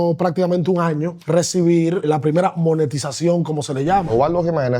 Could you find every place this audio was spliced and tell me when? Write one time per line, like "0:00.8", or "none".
0:01.2
0:02.0
0:04.1